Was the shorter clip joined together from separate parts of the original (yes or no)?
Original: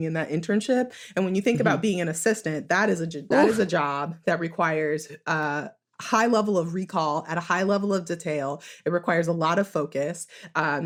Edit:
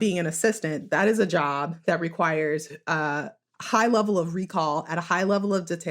yes